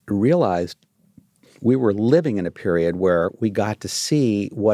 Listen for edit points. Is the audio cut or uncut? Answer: uncut